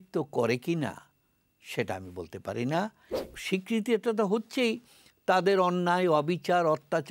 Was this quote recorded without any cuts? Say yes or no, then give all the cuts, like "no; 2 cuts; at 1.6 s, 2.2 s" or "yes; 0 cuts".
no; 1 cut; at 3.2 s